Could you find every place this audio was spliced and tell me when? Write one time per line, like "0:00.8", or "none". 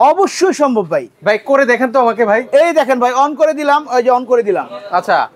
none